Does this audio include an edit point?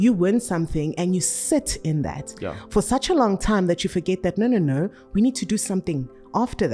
no; 0 cuts

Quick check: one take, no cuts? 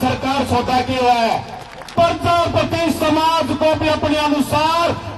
no; 1 cut; at 1.9 s

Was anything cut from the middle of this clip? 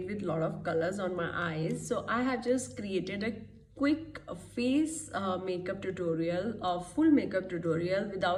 no; 0 cuts

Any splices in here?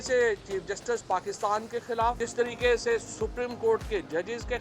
yes; 1 cut; at 2.2 s

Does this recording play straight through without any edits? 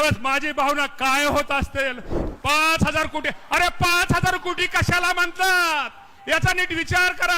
no; 1 cut; at 2.1 s

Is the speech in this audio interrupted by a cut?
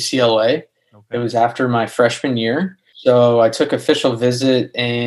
yes; 1 cut; at 2.8 s

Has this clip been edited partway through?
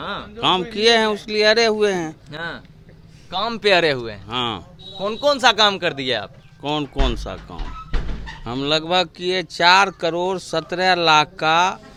no; 0 cuts

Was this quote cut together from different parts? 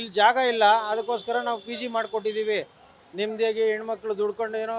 no; 0 cuts

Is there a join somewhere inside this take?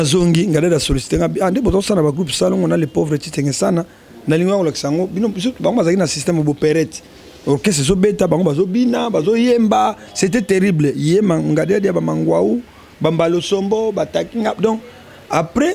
no; 0 cuts

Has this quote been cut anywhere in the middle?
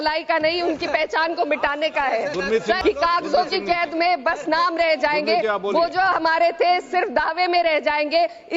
yes; 1 cut; at 2.8 s

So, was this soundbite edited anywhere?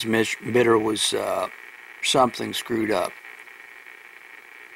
yes; 1 cut; at 1.6 s

